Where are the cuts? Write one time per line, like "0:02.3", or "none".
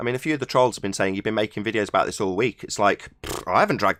none